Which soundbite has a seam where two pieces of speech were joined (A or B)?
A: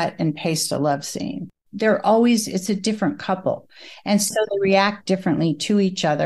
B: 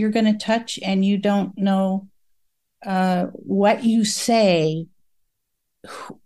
A